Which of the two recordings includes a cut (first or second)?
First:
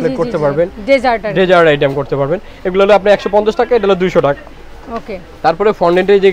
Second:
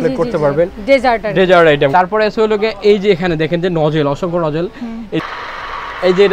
second